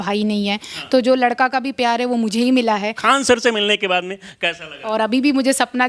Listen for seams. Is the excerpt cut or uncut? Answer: cut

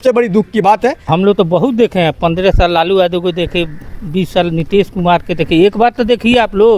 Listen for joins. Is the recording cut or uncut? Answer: cut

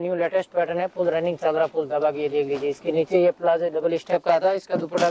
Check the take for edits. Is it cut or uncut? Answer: uncut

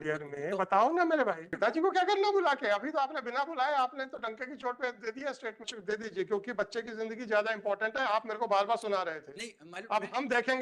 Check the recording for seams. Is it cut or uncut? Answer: cut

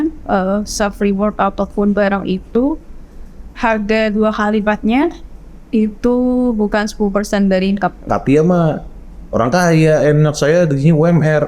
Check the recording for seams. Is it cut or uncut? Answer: cut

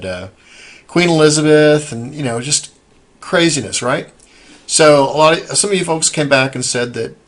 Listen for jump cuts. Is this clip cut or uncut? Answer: uncut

